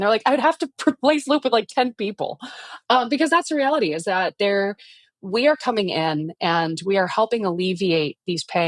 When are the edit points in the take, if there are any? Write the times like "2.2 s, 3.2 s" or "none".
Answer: none